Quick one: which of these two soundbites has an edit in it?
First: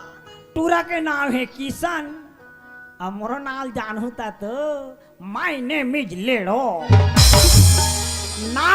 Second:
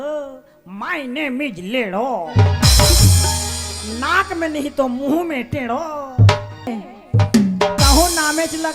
second; 1 cut; at 6.9 s

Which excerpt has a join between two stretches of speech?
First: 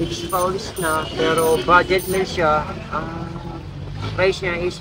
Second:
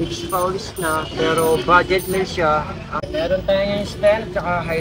second; 1 cut; at 3.1 s

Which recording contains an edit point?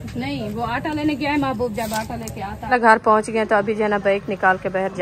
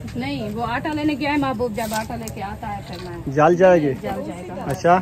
first; 1 cut; at 2.7 s

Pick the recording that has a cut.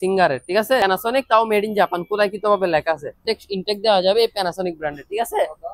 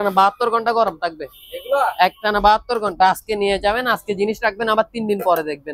first; 2 cuts; at 0.8 s, 3.2 s

